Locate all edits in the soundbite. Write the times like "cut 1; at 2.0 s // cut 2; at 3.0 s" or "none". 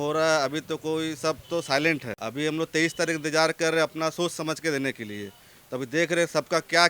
cut 1; at 2.2 s

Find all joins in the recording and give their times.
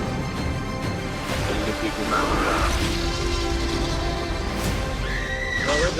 none

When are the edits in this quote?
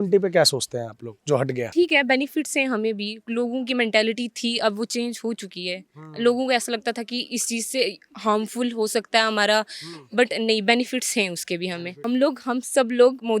cut 1; at 1.7 s // cut 2; at 12.1 s

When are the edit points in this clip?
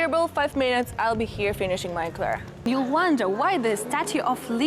cut 1; at 2.7 s

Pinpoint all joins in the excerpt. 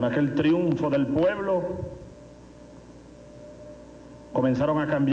cut 1; at 3.0 s

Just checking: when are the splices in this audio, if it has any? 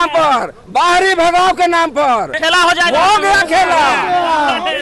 cut 1; at 2.3 s

